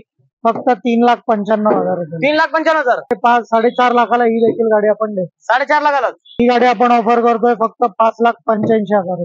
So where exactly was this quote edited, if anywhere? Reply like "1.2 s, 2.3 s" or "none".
3.1 s, 6.4 s